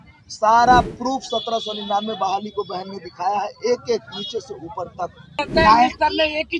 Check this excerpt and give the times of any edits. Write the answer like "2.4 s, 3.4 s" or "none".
5.3 s